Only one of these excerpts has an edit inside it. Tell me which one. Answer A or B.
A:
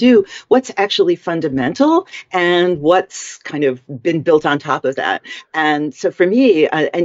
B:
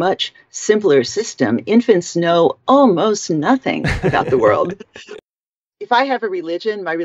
B